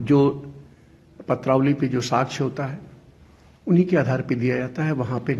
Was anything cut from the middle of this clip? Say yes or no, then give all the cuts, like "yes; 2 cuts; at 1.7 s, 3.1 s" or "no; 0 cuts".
no; 0 cuts